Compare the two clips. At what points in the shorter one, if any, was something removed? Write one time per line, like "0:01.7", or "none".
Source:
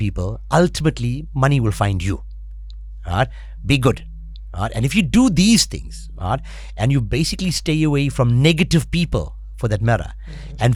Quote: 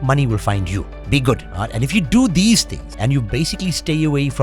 0:00.9
0:01.5
0:02.8